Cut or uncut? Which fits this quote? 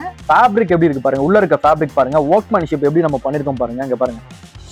uncut